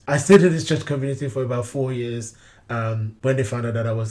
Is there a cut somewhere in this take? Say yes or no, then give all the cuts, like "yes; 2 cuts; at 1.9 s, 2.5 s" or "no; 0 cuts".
no; 0 cuts